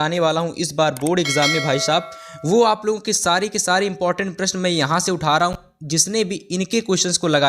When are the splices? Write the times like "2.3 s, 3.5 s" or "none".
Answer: 5.5 s